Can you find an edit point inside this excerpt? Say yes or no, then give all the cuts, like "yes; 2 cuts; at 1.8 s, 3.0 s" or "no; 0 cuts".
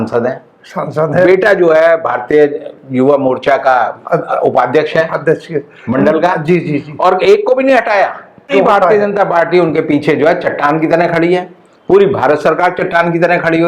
yes; 1 cut; at 8.5 s